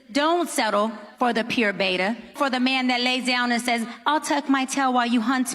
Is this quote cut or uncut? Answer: cut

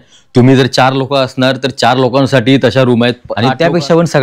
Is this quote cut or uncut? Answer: cut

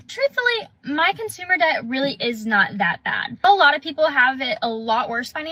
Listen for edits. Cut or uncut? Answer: uncut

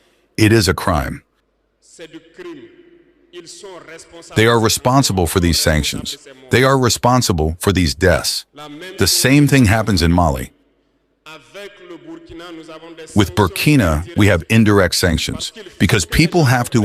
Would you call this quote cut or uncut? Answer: uncut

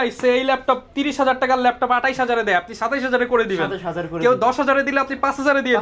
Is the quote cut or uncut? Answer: uncut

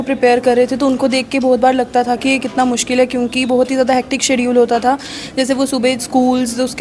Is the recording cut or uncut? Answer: uncut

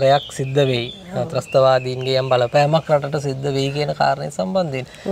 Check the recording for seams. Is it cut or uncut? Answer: uncut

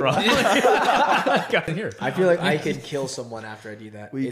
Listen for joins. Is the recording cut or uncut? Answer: cut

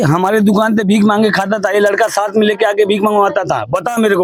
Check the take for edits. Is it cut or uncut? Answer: uncut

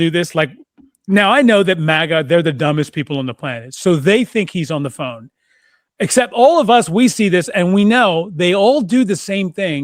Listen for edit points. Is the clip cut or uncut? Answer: uncut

